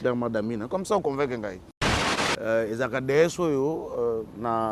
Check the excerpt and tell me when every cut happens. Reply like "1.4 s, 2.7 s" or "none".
1.9 s